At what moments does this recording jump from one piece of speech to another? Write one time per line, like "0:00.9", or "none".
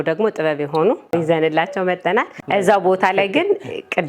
0:01.1
0:02.4